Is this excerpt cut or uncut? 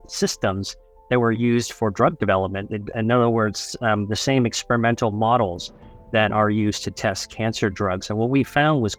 uncut